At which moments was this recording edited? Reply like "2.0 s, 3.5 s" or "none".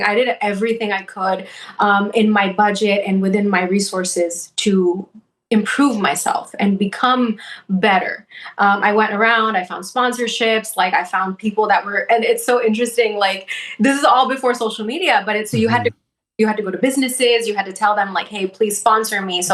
none